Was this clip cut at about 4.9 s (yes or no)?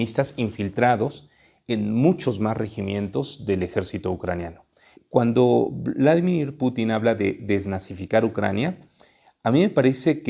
yes